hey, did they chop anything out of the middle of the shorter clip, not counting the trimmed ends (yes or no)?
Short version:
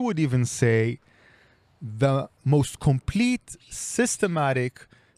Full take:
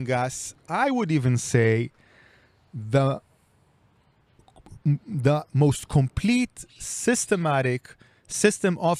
yes